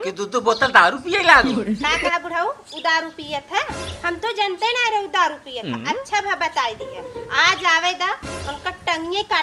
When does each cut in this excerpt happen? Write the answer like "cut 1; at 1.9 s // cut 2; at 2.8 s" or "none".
none